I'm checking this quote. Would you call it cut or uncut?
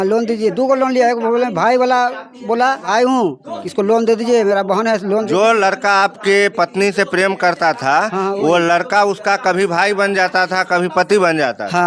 uncut